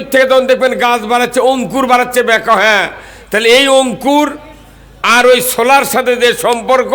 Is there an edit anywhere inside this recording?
no; 0 cuts

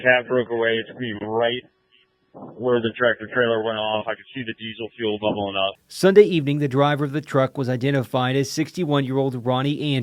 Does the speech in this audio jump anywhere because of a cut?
no; 0 cuts

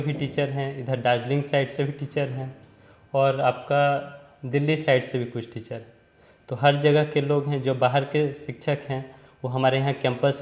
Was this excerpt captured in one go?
yes; 0 cuts

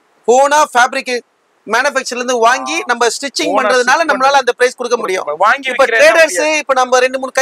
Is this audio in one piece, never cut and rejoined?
yes; 0 cuts

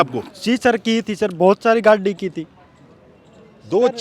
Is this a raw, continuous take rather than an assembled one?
yes; 0 cuts

